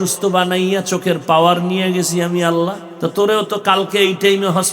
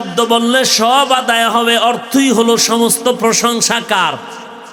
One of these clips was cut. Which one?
first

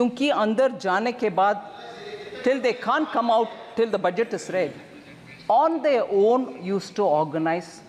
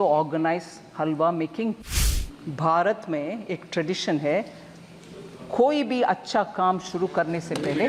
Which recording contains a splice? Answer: second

